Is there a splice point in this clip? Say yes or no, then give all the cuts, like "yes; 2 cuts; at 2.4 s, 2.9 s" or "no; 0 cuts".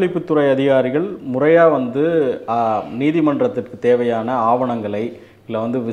no; 0 cuts